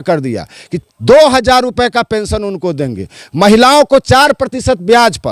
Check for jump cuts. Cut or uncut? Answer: uncut